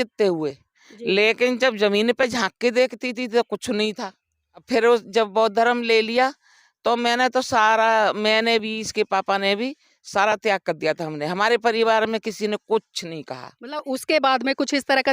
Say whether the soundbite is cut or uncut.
cut